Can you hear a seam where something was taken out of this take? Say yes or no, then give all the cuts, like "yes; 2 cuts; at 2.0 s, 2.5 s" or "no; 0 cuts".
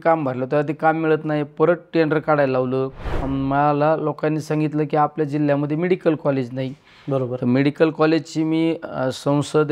yes; 1 cut; at 3.2 s